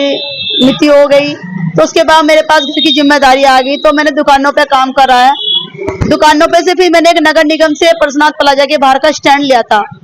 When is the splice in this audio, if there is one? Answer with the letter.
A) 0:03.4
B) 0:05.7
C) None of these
C